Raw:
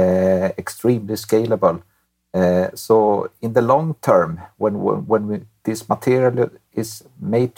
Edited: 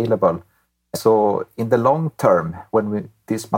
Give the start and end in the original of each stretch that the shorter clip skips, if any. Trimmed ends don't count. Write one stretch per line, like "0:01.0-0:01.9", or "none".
0:02.3-0:02.7
0:04.5-0:05.0